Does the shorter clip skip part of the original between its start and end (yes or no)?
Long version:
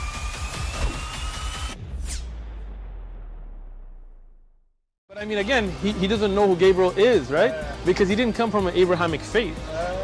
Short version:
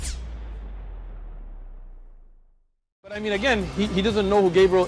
no